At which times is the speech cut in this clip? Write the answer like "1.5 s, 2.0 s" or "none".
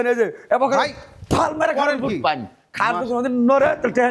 none